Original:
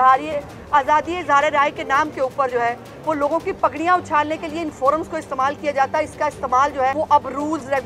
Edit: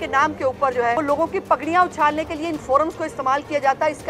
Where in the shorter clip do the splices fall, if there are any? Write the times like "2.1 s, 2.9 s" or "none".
1.0 s